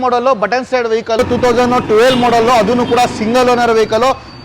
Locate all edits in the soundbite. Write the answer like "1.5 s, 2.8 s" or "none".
1.2 s